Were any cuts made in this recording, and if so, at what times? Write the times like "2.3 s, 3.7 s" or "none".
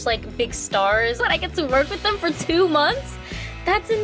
1.2 s